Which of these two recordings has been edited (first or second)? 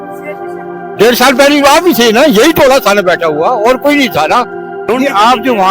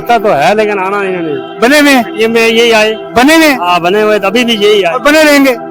first